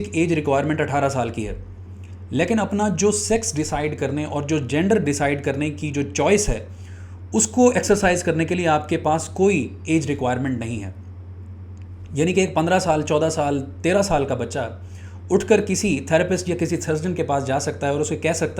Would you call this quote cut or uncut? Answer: uncut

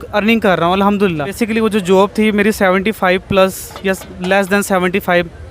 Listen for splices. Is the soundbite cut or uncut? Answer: cut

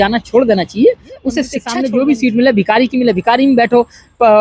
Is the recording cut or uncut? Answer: cut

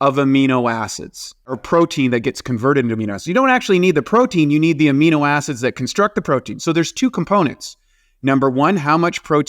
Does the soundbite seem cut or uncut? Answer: cut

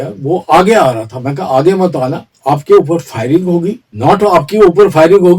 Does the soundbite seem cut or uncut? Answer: cut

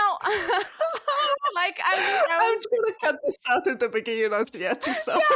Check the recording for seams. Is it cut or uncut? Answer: cut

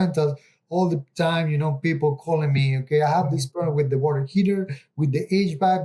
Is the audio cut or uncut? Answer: uncut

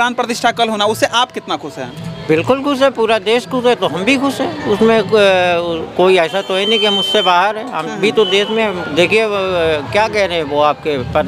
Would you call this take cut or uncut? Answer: uncut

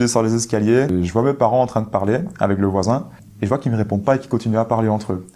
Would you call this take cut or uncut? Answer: cut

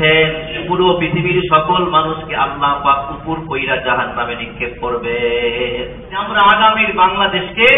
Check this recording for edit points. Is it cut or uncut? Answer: cut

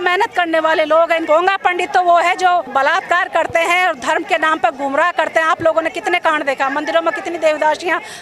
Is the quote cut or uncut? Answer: cut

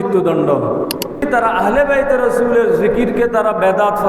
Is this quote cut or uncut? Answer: cut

